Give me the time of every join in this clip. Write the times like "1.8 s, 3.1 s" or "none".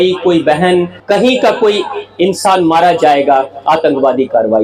1.0 s